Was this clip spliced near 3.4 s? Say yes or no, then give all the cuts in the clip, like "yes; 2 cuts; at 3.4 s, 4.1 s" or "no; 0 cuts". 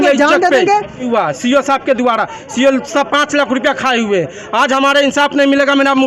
no; 1 cut; at 1.1 s